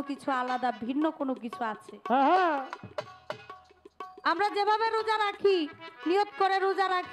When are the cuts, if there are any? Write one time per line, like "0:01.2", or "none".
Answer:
none